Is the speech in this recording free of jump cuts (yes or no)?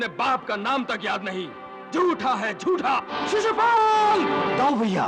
no